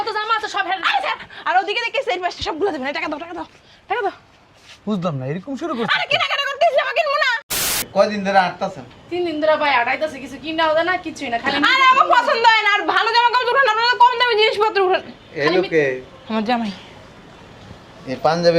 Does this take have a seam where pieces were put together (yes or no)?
yes